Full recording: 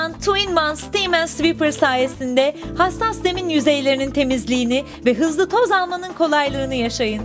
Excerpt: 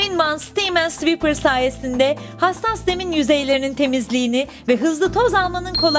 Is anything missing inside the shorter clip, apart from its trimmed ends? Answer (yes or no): no